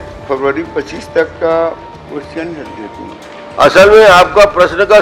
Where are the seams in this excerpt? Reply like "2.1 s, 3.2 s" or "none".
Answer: 3.4 s